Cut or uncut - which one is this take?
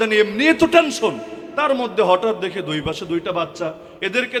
uncut